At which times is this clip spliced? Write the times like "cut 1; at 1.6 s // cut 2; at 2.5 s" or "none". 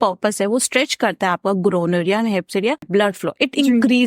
cut 1; at 2.8 s